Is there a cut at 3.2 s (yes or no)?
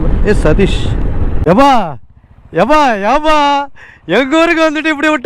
no